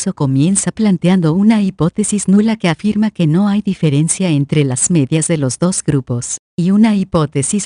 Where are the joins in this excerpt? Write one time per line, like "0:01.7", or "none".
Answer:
0:06.6